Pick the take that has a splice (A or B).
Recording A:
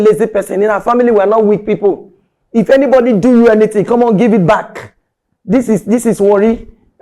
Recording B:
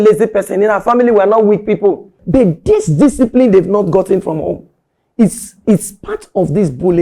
B